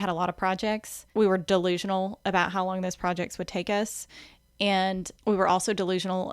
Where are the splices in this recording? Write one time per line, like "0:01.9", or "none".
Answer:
0:00.9
0:05.1